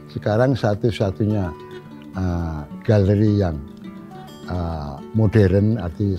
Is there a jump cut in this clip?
no; 0 cuts

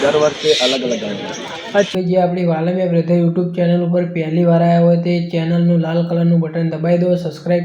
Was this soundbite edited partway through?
yes; 1 cut; at 1.9 s

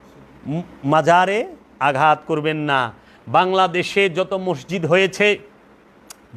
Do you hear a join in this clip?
no; 0 cuts

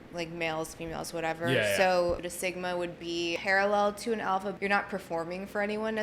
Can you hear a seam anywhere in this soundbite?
yes; 3 cuts; at 2.3 s, 3.4 s, 4.6 s

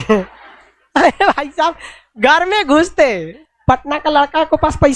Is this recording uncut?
no; 1 cut; at 3.3 s

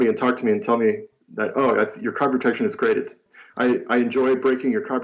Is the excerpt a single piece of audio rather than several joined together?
yes; 0 cuts

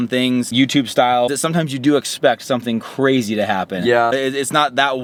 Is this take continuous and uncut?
yes; 0 cuts

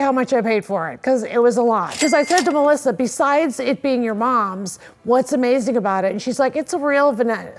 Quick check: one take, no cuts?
yes; 0 cuts

